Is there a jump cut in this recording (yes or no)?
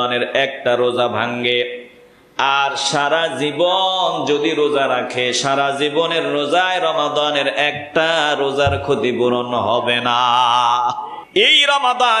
yes